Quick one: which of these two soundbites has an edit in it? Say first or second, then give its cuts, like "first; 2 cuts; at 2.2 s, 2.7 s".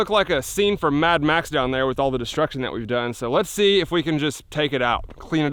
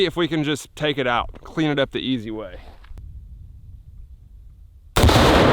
second; 1 cut; at 3.0 s